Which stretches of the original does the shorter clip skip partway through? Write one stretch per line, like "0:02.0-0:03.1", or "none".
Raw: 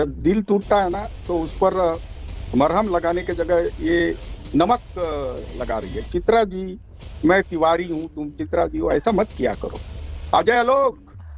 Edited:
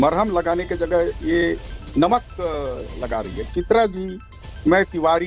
none